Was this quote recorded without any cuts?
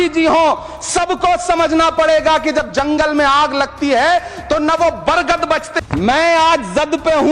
no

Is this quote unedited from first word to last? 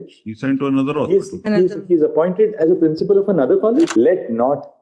no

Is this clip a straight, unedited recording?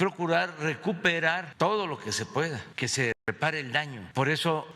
no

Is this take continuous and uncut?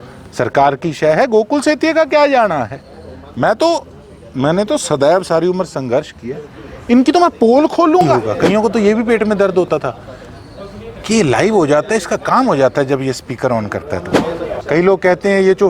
no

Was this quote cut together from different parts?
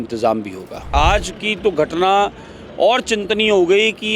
yes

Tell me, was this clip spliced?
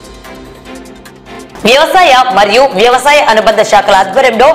yes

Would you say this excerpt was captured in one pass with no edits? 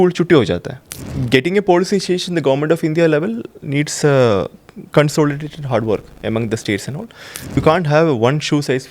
no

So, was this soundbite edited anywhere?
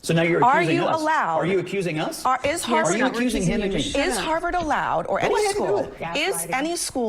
no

